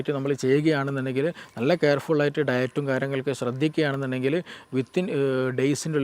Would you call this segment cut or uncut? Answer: uncut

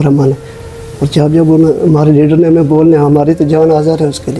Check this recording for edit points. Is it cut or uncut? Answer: uncut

